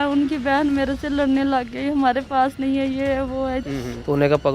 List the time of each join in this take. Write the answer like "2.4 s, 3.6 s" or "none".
3.6 s